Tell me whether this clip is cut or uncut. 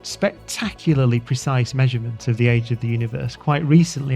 uncut